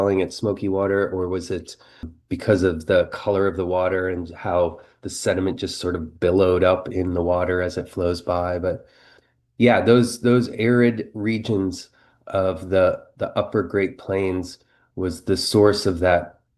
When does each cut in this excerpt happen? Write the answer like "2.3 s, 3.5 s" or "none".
2.2 s, 9.2 s